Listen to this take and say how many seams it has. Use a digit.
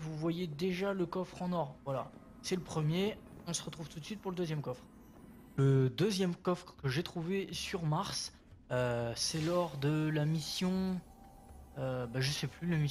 1